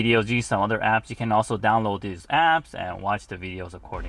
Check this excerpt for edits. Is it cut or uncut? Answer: uncut